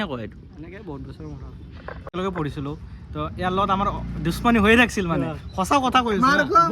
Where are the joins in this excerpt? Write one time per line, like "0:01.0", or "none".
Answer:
0:02.1

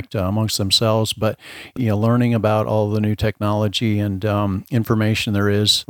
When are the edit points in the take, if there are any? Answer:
0:01.8

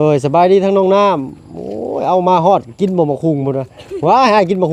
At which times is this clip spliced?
none

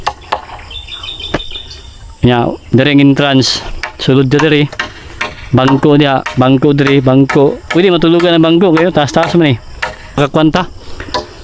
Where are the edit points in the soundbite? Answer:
0:10.2

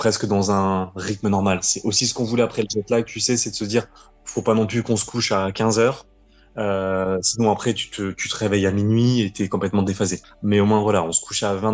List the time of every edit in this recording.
0:10.2

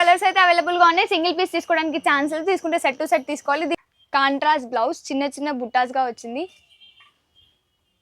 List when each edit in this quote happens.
0:03.8

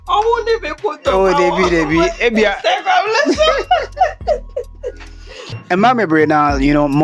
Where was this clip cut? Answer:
none

